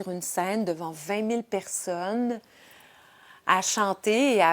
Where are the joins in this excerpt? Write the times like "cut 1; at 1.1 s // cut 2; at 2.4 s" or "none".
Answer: none